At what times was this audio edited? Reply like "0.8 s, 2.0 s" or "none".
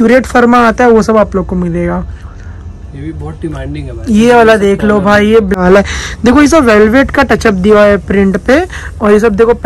5.6 s